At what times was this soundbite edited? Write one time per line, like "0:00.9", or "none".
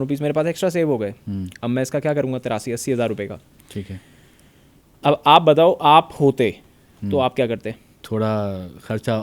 0:07.9